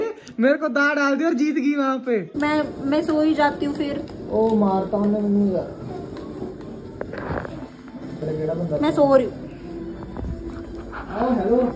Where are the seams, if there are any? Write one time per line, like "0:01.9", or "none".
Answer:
0:02.3
0:08.2